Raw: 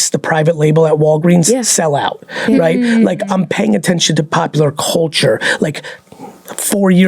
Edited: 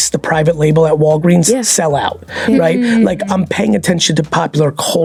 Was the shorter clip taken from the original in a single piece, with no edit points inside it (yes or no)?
yes